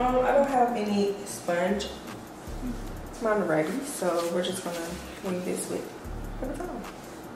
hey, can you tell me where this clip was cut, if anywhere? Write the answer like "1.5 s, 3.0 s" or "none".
none